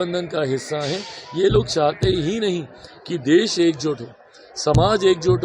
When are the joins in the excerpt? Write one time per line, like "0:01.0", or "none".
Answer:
none